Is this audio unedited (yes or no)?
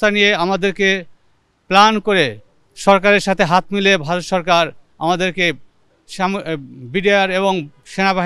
yes